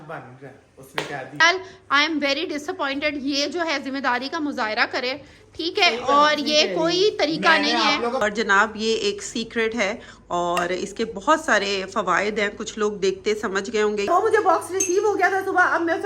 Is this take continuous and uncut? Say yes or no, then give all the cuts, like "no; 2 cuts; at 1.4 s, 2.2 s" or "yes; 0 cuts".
no; 3 cuts; at 1.4 s, 8.2 s, 14.1 s